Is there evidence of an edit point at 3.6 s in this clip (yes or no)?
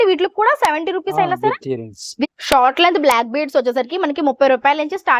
no